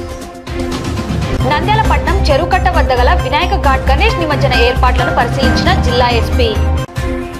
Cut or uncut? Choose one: uncut